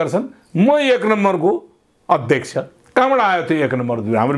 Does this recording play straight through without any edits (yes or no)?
yes